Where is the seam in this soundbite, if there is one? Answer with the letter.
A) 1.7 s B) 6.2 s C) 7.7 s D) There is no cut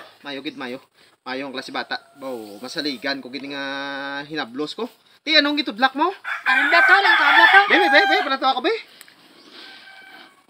D